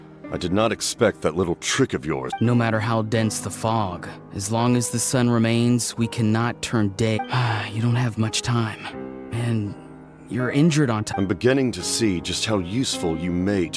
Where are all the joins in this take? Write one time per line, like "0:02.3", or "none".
0:02.3
0:07.2
0:11.1